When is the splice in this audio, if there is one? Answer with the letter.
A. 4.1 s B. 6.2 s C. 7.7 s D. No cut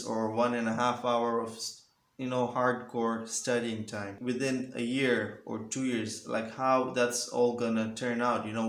A